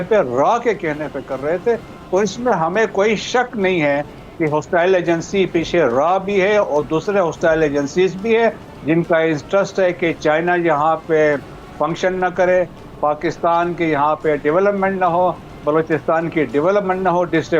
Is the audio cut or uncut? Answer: uncut